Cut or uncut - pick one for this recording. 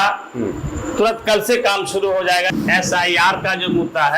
cut